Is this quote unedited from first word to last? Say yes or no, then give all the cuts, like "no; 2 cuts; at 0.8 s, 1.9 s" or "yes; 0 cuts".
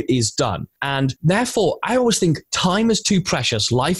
no; 1 cut; at 1.0 s